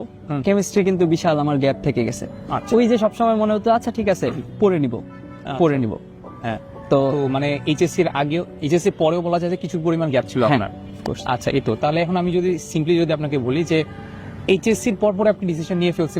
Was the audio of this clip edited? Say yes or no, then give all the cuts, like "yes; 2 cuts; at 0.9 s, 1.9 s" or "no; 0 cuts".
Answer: no; 0 cuts